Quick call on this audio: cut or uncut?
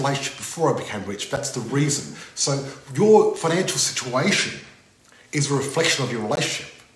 uncut